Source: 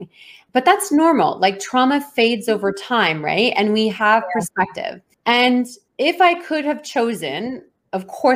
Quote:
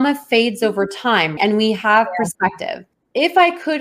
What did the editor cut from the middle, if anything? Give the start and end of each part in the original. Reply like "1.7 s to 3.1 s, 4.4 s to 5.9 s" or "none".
3.2 s to 3.5 s, 5.1 s to 5.8 s